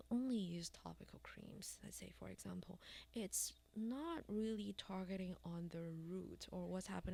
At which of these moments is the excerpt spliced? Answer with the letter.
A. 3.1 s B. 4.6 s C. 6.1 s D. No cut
D